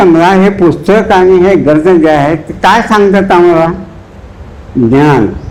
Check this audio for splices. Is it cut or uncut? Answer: uncut